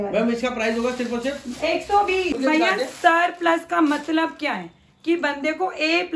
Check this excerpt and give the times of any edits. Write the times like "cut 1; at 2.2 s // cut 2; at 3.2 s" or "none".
cut 1; at 2.4 s